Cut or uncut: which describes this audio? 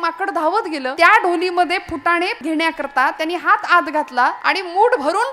cut